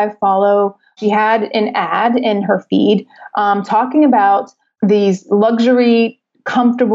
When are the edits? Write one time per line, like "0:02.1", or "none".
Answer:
0:00.9
0:04.6